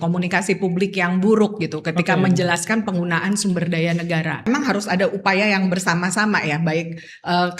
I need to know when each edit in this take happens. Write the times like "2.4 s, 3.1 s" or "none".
4.5 s

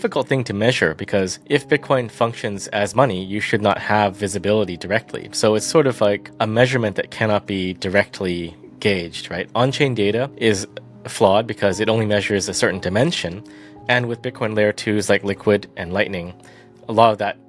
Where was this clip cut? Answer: 1.4 s, 6.3 s, 10.3 s

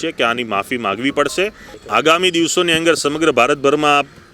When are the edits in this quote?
1.7 s

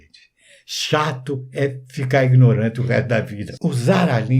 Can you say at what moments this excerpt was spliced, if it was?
3.4 s

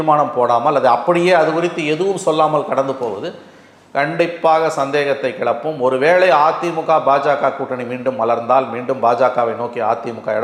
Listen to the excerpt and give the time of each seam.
none

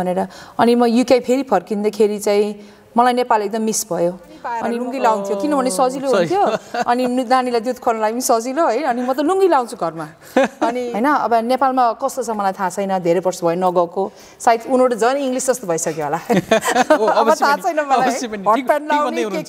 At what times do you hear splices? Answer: 4.6 s, 10.8 s

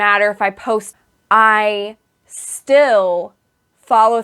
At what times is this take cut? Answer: 0.9 s

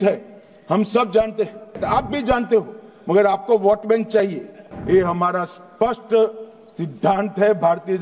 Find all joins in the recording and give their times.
1.8 s, 4.7 s

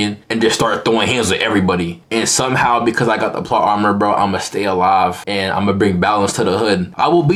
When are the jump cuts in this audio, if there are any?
none

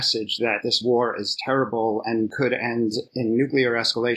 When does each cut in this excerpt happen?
none

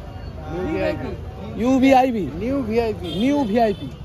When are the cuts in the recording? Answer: none

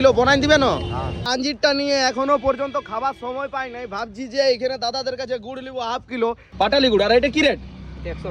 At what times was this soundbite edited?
1.2 s, 6.5 s

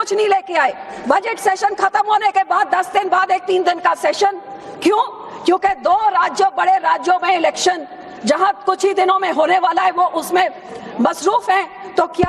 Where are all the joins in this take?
1.3 s

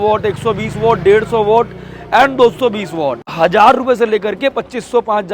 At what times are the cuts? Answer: 3.2 s

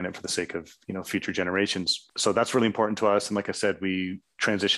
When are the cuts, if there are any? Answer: 2.0 s

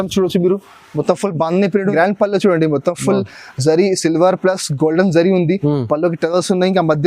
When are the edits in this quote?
1.9 s

